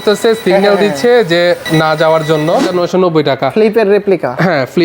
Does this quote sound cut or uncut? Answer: cut